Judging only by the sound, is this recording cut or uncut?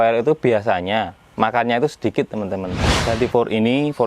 cut